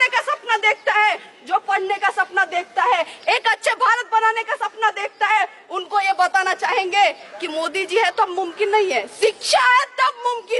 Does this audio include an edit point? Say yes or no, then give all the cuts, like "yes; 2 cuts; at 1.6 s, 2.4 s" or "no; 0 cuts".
no; 0 cuts